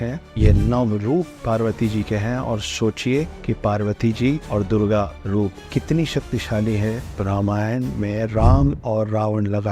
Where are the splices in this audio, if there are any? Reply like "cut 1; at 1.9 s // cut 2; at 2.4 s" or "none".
cut 1; at 3.4 s // cut 2; at 4.4 s // cut 3; at 5.3 s // cut 4; at 7.2 s